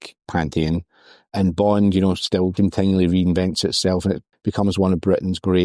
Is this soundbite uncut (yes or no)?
no